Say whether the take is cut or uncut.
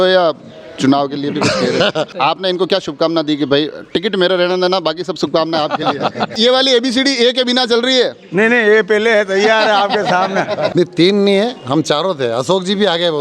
cut